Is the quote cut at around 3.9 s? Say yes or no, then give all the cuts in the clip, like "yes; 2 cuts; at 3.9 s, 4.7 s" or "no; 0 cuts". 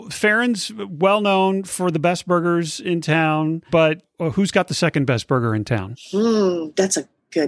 yes; 1 cut; at 3.9 s